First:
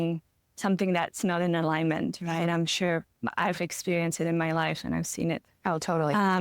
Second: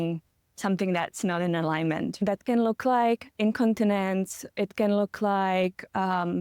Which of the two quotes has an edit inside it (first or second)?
second